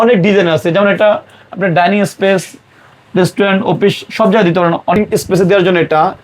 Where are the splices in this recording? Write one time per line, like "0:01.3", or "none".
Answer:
0:05.0